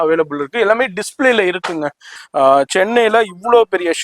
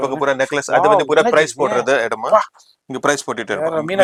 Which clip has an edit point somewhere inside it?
first; 1 cut; at 2.1 s

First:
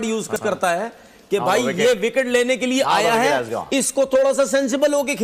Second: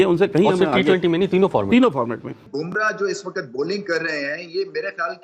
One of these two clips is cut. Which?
second; 1 cut; at 2.4 s

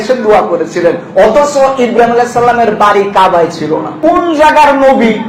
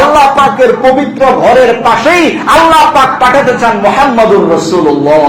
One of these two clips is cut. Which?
first; 1 cut; at 3.9 s

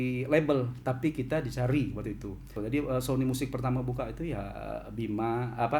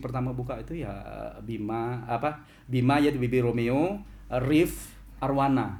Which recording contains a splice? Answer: first; 1 cut; at 2.5 s

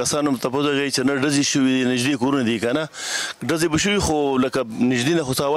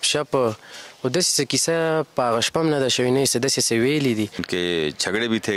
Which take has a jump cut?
second; 1 cut; at 4.4 s

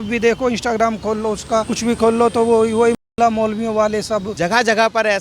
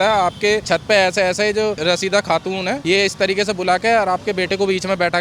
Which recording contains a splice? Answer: first; 1 cut; at 4.3 s

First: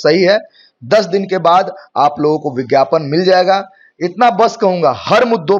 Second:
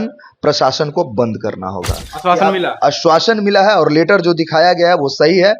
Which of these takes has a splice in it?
second; 1 cut; at 2.1 s

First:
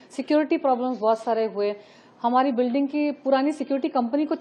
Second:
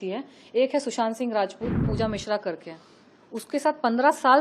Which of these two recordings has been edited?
second; 1 cut; at 1.9 s

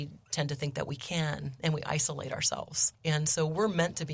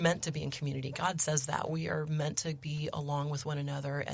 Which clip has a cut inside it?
first; 1 cut; at 2.8 s

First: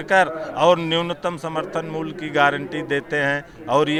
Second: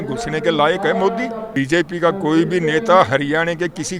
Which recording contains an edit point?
second; 1 cut; at 1.4 s

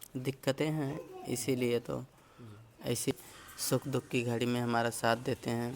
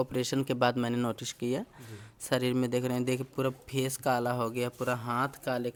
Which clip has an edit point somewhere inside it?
first; 1 cut; at 3.1 s

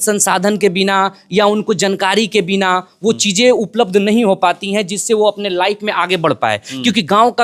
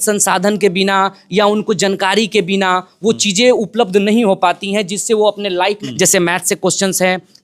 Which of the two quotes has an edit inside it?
second; 1 cut; at 5.8 s

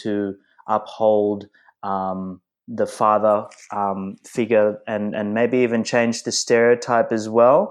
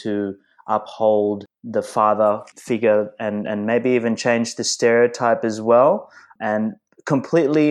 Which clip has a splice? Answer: second; 3 cuts; at 1.5 s, 2.5 s, 6.3 s

